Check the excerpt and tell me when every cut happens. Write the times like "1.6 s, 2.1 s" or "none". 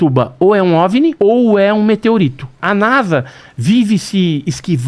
1.2 s, 2.6 s